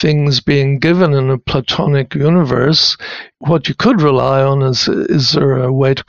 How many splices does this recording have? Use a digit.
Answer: 0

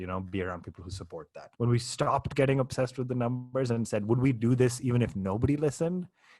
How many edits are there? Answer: 1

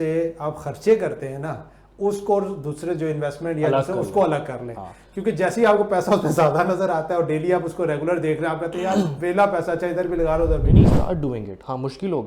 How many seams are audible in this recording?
1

